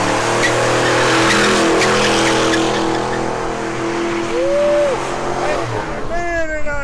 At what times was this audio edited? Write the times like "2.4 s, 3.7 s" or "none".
none